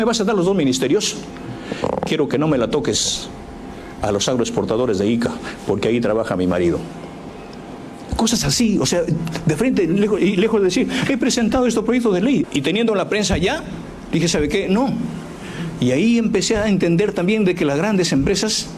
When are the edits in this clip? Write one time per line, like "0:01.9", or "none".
0:12.4